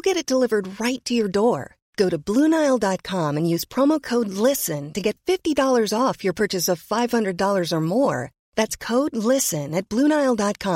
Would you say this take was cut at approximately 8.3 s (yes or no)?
no